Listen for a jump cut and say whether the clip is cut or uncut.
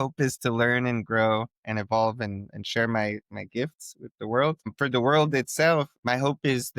cut